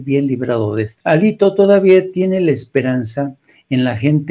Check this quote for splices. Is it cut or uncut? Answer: cut